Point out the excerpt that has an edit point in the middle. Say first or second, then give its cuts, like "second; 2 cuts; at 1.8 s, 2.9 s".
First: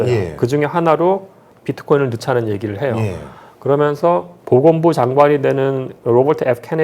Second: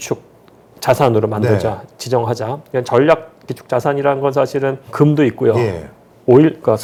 first; 1 cut; at 4.3 s